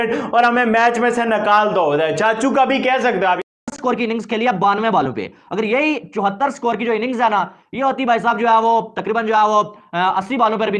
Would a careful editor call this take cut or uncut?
cut